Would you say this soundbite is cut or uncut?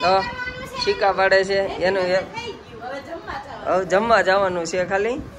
uncut